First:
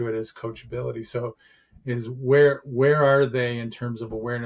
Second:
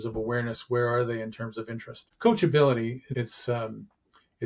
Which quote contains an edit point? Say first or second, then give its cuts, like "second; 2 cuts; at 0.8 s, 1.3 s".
second; 2 cuts; at 2.0 s, 3.0 s